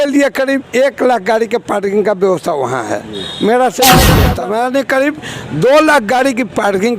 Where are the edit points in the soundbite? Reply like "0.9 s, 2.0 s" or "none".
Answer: 4.1 s